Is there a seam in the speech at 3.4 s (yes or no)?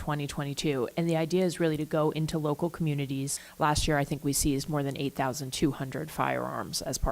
yes